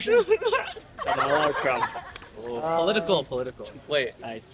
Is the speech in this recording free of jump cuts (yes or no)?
yes